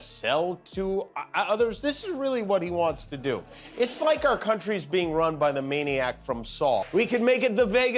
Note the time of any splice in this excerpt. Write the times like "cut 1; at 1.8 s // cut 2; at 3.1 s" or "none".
none